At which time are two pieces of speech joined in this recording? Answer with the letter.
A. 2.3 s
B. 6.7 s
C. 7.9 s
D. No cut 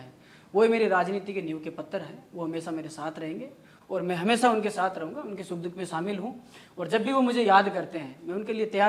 D